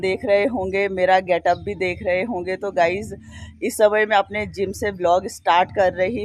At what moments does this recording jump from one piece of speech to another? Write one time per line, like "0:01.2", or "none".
none